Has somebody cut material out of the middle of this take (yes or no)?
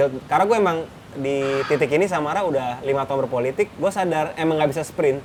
no